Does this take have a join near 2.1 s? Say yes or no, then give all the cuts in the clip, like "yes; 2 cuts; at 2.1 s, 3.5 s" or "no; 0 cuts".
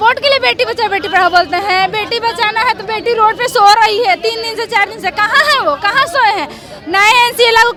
no; 0 cuts